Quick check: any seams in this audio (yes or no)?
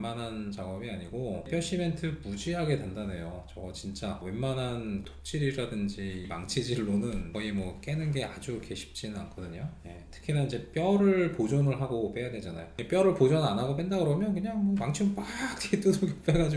no